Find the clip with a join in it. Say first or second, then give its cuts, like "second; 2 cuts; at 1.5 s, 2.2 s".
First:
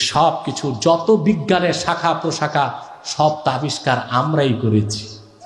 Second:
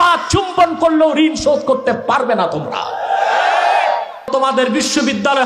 second; 1 cut; at 4.3 s